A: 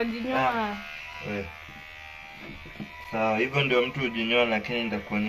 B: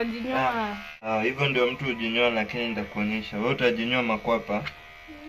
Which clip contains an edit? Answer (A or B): B